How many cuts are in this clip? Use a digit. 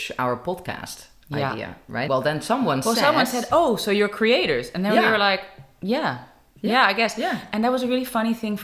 1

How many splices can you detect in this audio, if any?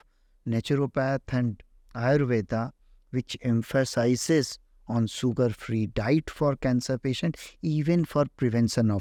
0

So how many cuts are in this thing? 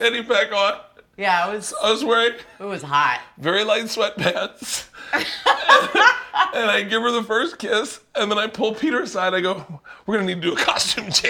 0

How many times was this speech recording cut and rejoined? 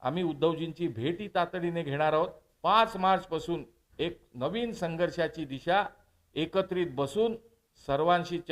1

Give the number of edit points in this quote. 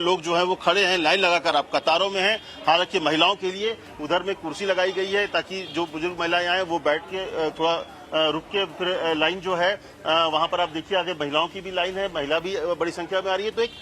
1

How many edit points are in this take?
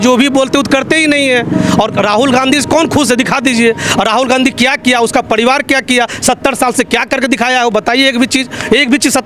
0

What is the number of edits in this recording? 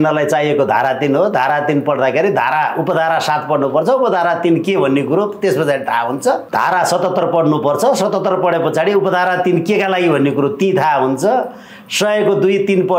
1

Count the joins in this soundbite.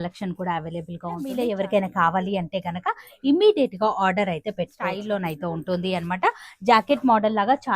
2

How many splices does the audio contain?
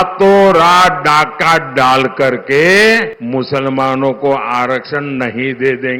1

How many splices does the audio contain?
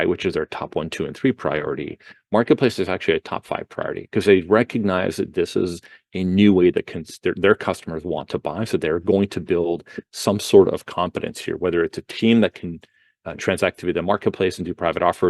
0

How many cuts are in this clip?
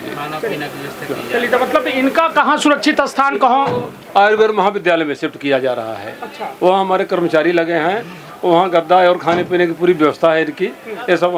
0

